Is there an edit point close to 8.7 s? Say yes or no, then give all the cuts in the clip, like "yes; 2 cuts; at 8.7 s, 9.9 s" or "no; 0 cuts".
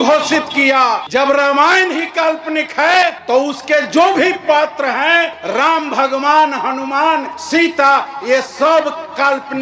no; 4 cuts; at 1.0 s, 3.2 s, 5.4 s, 7.3 s